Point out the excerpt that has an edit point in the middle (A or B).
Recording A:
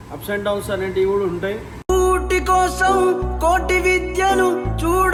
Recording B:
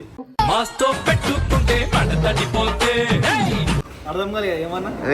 B